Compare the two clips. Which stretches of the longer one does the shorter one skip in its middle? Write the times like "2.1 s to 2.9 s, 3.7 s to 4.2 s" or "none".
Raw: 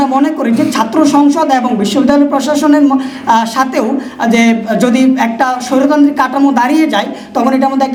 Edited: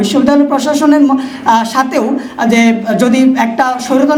none